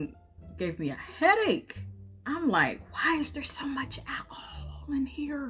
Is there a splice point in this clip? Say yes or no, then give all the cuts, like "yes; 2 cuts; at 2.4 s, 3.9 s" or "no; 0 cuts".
no; 0 cuts